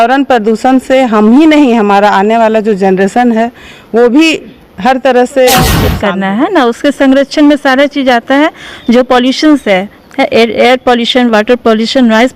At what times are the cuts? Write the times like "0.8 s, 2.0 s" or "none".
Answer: 5.9 s